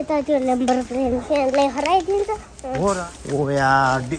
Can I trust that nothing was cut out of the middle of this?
no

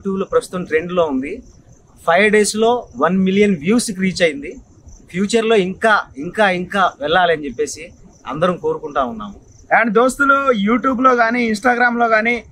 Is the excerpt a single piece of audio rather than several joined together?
yes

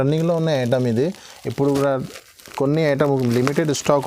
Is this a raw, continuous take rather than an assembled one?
yes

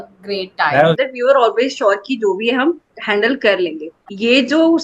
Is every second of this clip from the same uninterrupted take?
no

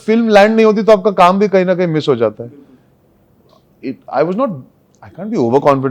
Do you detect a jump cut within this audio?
no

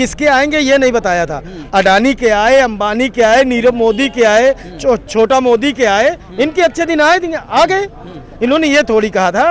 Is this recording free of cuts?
yes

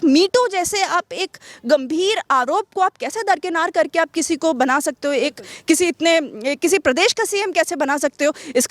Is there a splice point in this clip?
no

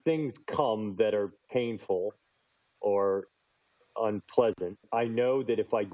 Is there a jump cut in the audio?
no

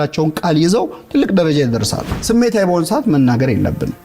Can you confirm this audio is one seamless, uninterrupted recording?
no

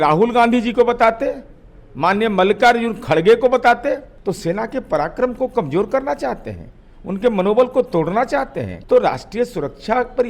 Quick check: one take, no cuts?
no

